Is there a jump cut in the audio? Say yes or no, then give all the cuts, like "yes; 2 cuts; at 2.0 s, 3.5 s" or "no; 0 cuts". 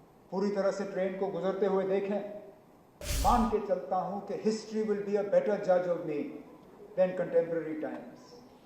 yes; 1 cut; at 3.1 s